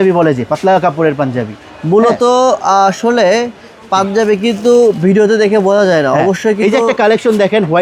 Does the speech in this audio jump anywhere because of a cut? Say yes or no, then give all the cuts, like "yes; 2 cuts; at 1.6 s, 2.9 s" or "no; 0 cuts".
no; 0 cuts